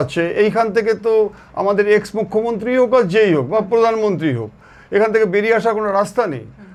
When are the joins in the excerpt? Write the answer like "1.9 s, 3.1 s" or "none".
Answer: none